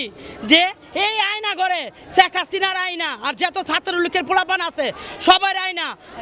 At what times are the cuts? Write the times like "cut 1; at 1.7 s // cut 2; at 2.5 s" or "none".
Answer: none